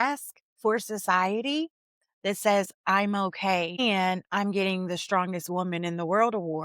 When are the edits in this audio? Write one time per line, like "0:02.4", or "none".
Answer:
0:03.8